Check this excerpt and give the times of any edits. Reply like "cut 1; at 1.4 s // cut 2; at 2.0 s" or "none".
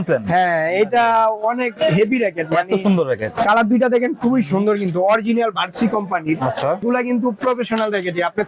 cut 1; at 6.8 s